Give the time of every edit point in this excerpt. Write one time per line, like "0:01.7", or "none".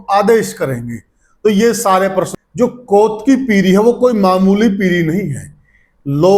0:02.4